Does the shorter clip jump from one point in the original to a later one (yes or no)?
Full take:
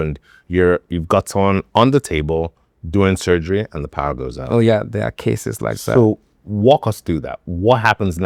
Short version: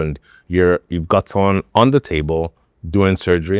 no